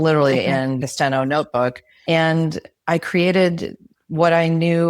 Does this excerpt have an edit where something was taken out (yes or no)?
yes